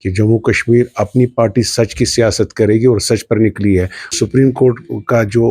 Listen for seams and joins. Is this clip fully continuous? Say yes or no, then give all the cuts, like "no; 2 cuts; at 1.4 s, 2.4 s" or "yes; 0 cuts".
no; 1 cut; at 4.1 s